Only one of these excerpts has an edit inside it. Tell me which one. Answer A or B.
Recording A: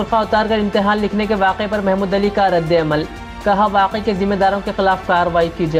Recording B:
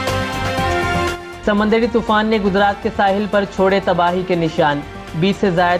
B